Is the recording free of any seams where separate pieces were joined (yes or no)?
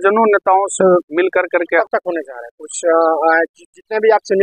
no